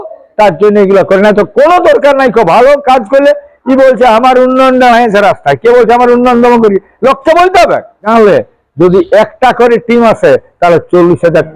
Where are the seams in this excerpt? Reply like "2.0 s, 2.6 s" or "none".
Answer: 8.1 s